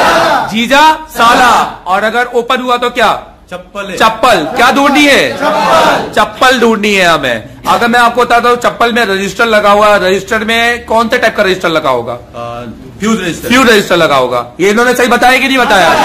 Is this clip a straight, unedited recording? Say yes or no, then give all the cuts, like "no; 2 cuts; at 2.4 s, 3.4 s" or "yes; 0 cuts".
yes; 0 cuts